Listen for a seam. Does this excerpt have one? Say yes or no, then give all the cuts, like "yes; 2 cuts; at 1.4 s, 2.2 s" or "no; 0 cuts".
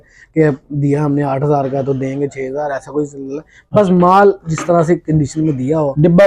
no; 0 cuts